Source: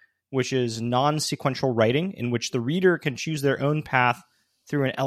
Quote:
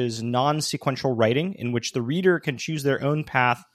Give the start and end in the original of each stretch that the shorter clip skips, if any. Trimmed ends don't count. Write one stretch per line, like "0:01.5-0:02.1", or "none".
none